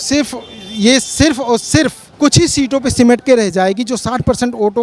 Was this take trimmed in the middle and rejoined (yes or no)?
yes